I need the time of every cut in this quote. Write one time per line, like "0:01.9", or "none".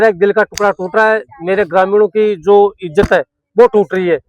none